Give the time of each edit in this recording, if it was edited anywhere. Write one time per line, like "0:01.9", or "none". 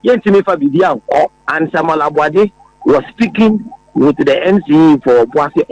0:01.4